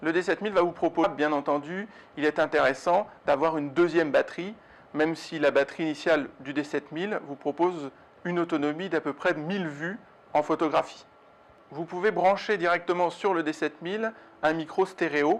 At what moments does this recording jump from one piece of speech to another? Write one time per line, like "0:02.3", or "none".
none